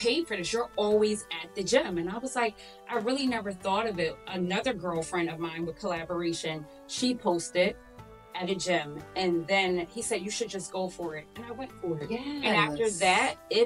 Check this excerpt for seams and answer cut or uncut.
uncut